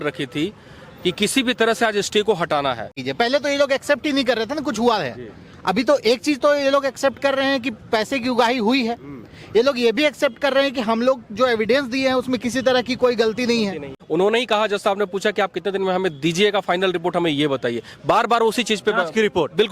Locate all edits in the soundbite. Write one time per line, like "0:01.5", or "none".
0:03.0
0:13.9